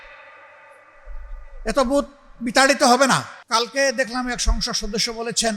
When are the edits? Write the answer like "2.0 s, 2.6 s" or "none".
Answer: 3.3 s